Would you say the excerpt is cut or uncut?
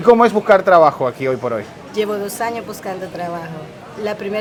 uncut